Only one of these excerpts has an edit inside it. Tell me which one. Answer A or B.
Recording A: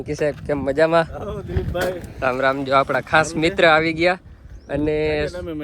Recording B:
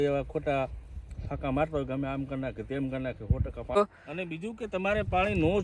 B